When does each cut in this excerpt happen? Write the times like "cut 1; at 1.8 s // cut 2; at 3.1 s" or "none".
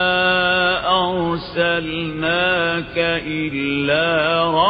none